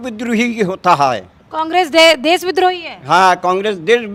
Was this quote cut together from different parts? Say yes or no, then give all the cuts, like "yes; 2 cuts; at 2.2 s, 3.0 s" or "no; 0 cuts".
no; 0 cuts